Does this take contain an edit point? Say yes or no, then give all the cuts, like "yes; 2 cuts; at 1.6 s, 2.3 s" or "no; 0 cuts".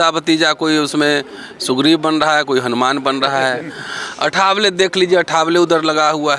no; 0 cuts